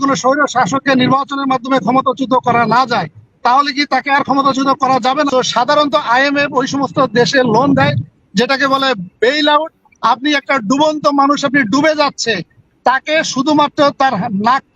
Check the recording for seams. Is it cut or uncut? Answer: cut